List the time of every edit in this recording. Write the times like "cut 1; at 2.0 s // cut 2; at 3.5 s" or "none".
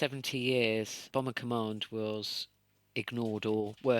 cut 1; at 1.0 s